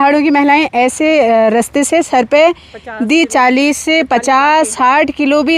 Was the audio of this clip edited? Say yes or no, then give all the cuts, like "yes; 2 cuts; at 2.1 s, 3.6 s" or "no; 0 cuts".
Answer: no; 0 cuts